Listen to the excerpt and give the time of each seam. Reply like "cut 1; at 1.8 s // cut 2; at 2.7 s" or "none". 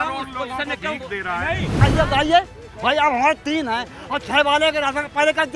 cut 1; at 1.8 s